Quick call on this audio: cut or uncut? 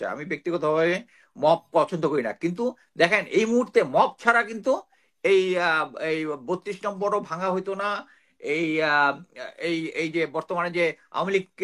uncut